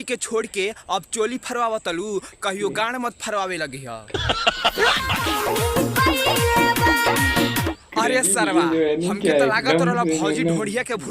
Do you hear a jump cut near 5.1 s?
yes; 1 cut; at 5.1 s

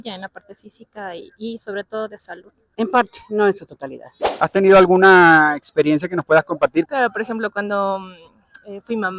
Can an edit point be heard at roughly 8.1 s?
no; 3 cuts; at 2.7 s, 4.3 s, 6.9 s

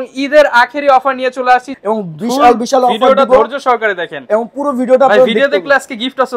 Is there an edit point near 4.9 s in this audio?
no; 1 cut; at 1.7 s

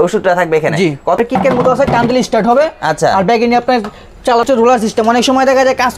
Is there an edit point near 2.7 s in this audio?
no; 2 cuts; at 1.2 s, 4.4 s

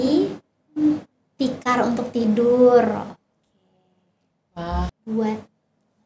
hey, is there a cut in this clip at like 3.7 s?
no; 1 cut; at 5.0 s

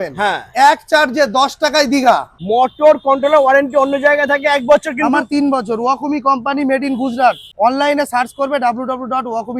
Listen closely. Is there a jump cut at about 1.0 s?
no; 2 cuts; at 2.3 s, 7.5 s

